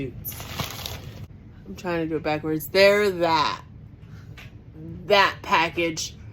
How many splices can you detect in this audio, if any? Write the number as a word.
one